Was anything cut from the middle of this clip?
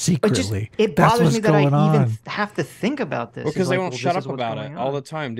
no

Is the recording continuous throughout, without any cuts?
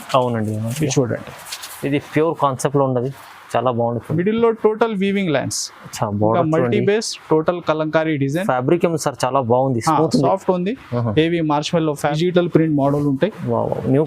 no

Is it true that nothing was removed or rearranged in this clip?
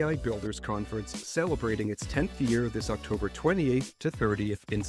yes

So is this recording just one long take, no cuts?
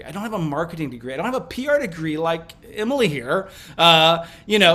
yes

